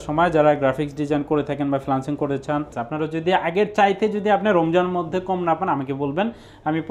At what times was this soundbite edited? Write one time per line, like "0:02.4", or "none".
0:02.8